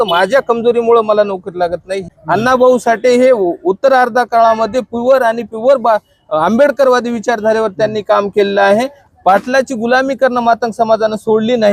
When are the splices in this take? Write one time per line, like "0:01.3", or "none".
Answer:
0:02.1
0:09.0